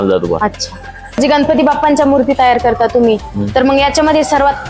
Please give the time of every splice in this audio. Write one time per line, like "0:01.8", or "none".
0:01.2